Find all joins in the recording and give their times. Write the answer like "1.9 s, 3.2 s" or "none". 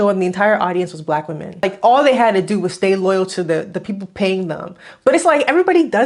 1.6 s